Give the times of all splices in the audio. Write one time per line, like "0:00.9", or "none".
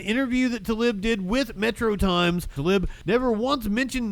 0:02.7